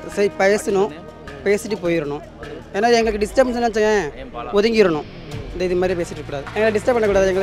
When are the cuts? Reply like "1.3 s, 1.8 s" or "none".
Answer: 6.5 s